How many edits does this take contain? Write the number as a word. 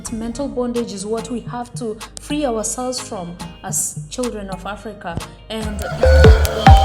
one